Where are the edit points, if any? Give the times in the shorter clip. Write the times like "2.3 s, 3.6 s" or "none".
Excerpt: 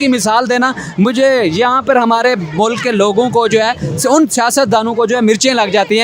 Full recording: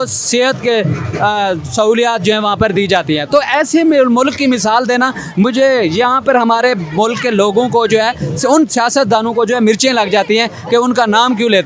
none